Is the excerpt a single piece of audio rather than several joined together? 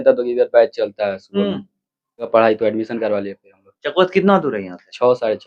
no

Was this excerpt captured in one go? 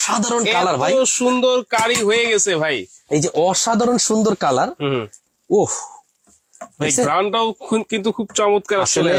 yes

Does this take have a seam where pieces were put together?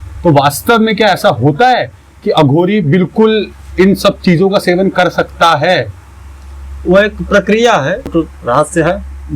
yes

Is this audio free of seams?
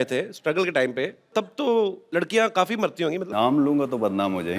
no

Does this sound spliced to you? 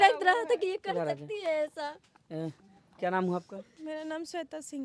no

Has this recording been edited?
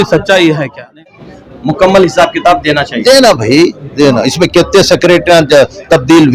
yes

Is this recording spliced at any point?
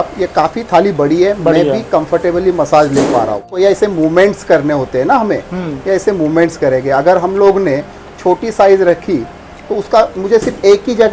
yes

